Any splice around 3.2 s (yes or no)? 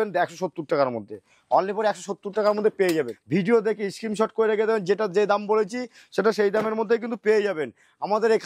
yes